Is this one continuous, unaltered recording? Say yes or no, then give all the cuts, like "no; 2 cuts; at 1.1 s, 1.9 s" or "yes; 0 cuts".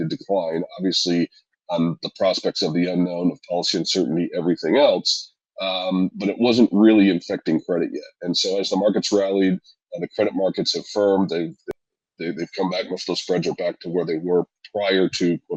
no; 1 cut; at 11.6 s